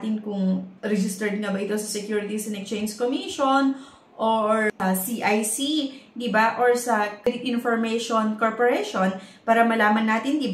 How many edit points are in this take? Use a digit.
1